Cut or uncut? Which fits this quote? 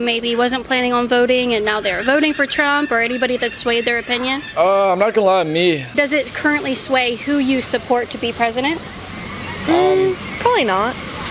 cut